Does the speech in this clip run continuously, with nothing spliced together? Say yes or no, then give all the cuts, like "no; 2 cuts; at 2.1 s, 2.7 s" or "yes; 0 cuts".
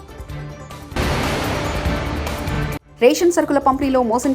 no; 2 cuts; at 0.9 s, 2.8 s